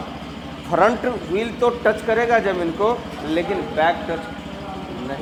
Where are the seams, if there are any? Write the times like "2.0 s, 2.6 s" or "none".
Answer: none